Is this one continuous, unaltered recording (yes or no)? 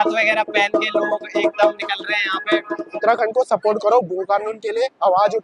no